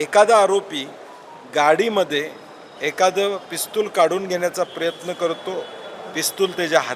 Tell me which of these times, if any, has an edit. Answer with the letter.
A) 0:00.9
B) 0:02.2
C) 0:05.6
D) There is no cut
D